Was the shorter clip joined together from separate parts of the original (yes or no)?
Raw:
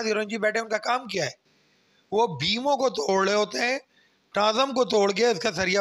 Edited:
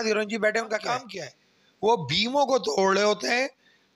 yes